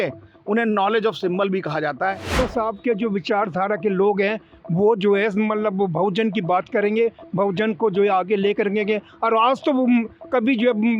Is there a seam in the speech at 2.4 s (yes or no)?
yes